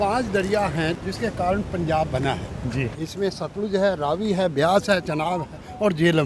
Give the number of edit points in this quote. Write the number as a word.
two